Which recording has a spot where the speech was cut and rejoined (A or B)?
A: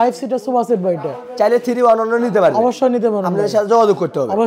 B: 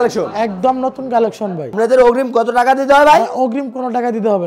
B